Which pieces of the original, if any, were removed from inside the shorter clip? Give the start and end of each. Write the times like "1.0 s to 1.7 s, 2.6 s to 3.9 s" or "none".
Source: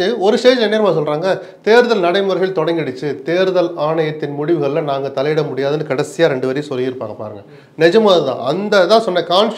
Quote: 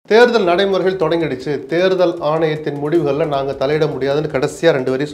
none